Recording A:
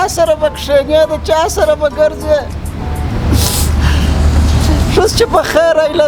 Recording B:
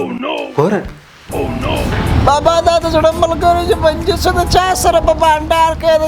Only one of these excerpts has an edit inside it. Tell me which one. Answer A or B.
B